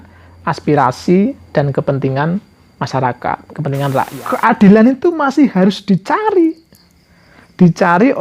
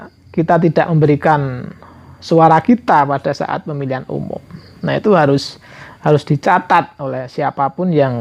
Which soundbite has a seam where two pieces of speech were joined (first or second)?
first